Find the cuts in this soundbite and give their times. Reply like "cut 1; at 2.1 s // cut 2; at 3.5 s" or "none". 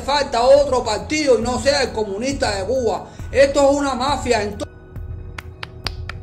none